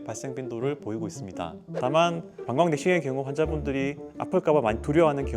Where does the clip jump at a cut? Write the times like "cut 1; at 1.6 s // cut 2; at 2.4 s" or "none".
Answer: cut 1; at 1.6 s